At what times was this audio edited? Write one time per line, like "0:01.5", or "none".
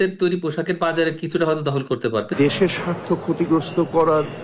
0:02.3